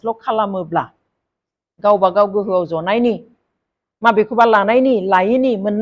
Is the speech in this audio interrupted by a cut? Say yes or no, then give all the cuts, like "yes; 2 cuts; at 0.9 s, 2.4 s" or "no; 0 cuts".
no; 0 cuts